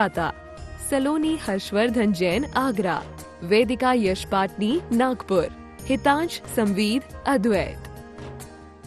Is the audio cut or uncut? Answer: uncut